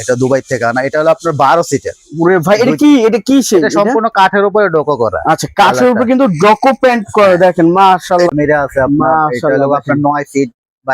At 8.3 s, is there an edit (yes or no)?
yes